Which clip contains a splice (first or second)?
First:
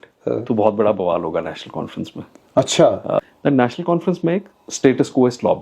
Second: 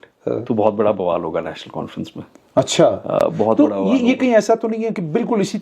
first